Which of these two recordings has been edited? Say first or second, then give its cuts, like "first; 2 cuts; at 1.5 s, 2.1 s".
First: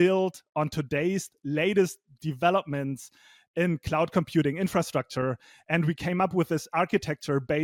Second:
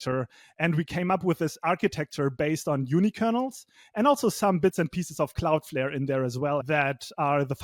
second; 1 cut; at 6.6 s